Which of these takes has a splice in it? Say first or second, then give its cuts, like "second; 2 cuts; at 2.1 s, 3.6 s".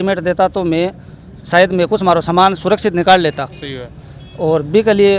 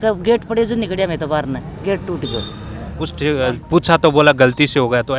second; 1 cut; at 3.1 s